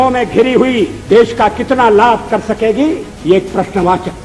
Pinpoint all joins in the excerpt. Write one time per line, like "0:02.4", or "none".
0:01.0
0:03.1